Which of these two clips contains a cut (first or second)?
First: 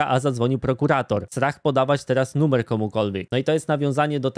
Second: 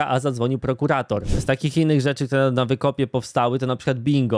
second